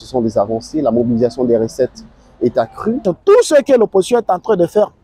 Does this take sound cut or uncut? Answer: cut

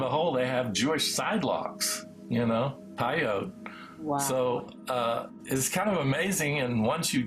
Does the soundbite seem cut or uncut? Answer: cut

